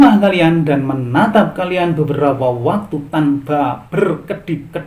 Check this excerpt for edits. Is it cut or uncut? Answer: uncut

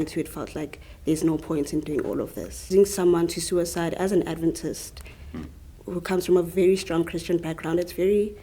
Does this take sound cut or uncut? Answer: cut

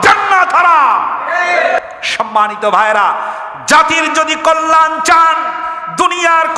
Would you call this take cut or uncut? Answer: cut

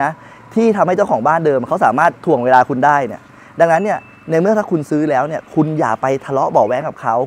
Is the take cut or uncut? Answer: uncut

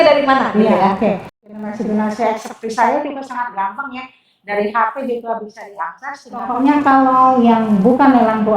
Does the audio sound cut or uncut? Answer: cut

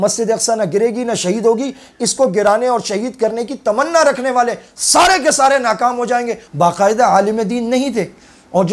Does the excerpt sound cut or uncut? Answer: cut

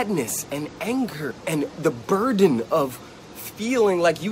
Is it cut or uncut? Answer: cut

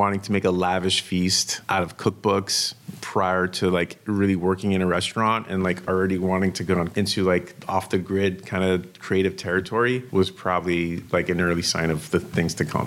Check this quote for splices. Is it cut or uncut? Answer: cut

